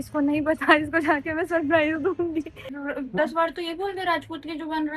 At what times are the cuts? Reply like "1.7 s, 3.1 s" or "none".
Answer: 2.6 s